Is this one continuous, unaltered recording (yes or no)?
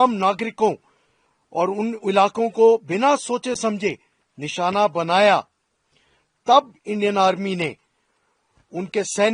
yes